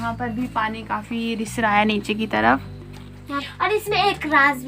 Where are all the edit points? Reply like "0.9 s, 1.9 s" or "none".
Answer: 3.3 s